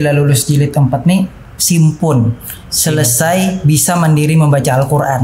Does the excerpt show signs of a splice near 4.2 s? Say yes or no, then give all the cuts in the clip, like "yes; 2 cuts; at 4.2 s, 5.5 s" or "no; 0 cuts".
no; 0 cuts